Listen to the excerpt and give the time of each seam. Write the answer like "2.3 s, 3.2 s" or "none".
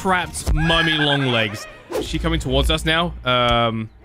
2.0 s